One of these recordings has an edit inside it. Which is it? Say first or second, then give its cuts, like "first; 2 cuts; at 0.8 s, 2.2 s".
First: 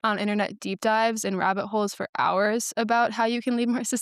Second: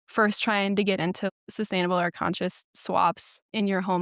second; 1 cut; at 1.3 s